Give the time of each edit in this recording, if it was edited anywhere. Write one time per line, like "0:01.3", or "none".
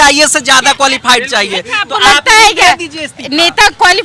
none